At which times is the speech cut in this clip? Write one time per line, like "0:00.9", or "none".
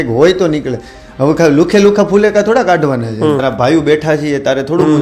0:03.4